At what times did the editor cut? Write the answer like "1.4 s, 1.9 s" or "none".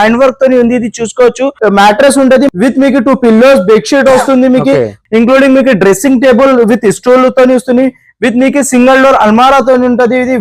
1.6 s, 2.5 s, 5.0 s